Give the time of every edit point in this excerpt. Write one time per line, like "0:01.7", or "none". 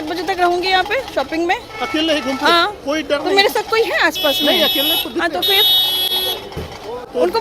none